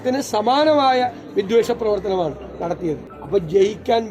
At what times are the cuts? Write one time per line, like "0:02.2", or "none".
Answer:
0:03.1